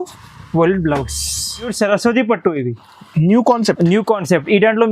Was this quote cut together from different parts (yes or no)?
yes